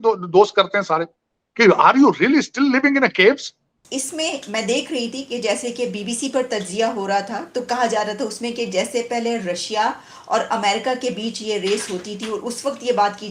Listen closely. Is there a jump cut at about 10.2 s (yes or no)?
no